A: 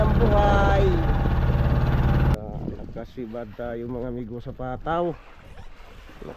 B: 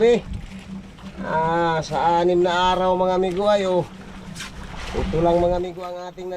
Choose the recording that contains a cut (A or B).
A